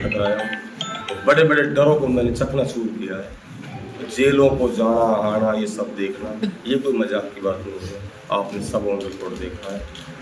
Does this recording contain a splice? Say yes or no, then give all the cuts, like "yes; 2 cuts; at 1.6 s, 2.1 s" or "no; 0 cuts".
no; 0 cuts